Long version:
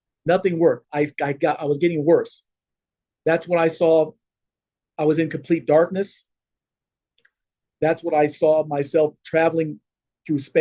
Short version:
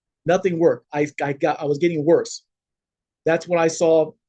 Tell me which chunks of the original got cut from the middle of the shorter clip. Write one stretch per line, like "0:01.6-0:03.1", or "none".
none